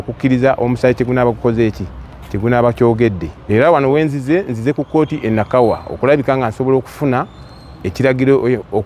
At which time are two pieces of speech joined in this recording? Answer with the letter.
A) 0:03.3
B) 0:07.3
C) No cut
A